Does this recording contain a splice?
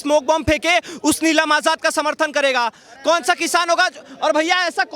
no; 0 cuts

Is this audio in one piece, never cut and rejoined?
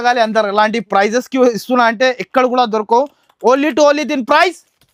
yes; 0 cuts

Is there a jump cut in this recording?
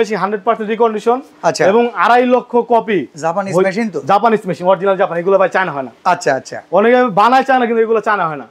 no; 0 cuts

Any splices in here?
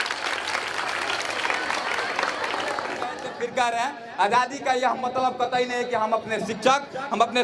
yes; 1 cut; at 3.2 s

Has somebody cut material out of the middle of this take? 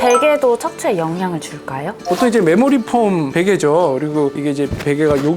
yes; 1 cut; at 2.0 s

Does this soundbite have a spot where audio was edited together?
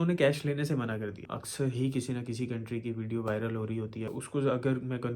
yes; 2 cuts; at 1.3 s, 4.1 s

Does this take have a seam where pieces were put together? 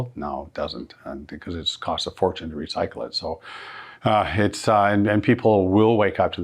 no; 0 cuts

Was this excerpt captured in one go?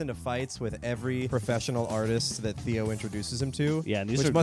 no; 1 cut; at 1.3 s

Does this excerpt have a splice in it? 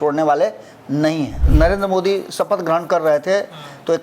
yes; 1 cut; at 1.4 s

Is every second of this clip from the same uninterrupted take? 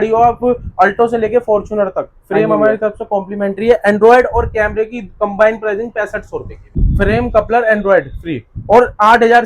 no; 1 cut; at 6.8 s

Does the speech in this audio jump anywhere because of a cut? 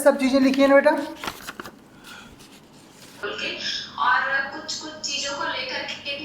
yes; 1 cut; at 3.2 s

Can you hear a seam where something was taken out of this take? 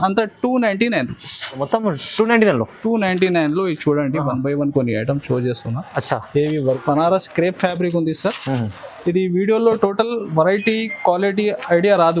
yes; 2 cuts; at 1.6 s, 6.6 s

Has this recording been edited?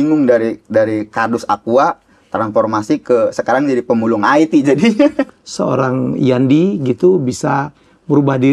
yes; 1 cut; at 5.2 s

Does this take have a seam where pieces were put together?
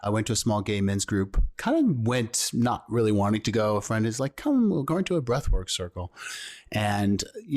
yes; 1 cut; at 1.5 s

